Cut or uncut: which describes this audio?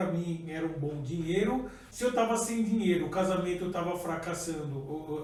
uncut